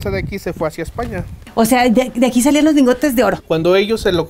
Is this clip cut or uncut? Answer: cut